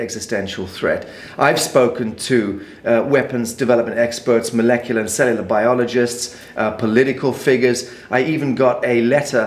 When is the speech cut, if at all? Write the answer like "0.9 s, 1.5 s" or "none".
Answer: none